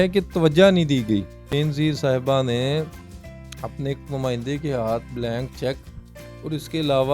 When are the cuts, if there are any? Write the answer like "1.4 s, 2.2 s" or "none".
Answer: 1.5 s